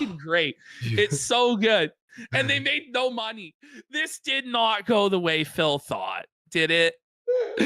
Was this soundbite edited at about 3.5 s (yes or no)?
yes